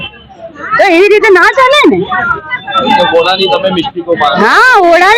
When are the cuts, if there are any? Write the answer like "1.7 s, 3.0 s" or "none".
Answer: none